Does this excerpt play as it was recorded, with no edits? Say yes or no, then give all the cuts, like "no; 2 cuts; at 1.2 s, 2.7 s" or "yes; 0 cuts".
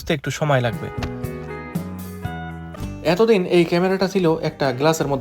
no; 1 cut; at 2.7 s